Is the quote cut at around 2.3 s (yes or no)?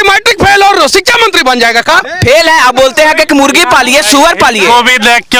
no